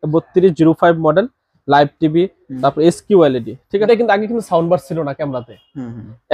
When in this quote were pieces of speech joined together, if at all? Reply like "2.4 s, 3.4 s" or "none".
none